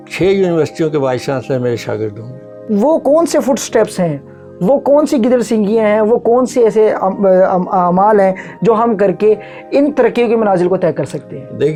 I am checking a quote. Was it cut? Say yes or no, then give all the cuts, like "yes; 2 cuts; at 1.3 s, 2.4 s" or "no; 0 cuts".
no; 0 cuts